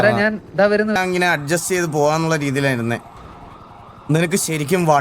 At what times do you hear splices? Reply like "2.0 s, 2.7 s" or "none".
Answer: 1.0 s